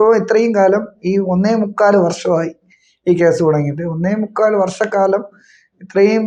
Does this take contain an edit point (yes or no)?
no